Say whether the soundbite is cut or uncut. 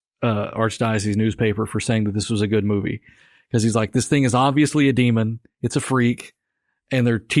uncut